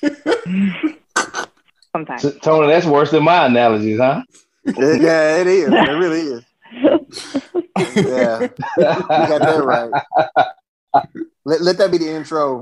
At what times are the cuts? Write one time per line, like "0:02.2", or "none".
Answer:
none